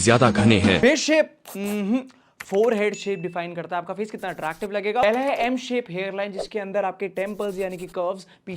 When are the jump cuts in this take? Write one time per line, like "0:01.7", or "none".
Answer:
0:00.8
0:05.0